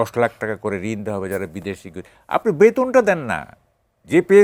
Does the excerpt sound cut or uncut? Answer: uncut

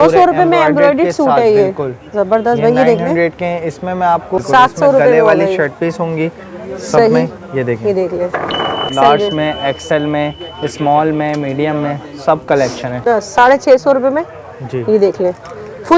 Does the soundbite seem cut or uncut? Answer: cut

